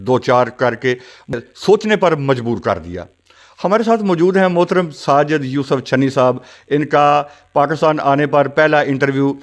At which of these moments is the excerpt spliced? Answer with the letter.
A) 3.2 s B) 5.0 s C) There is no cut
C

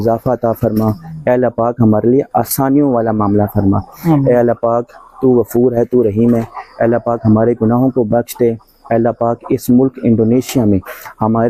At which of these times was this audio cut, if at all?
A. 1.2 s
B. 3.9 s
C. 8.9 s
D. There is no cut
D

